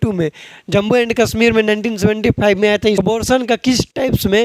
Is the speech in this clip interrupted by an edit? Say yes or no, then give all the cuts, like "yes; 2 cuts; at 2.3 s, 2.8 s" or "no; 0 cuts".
yes; 1 cut; at 3.0 s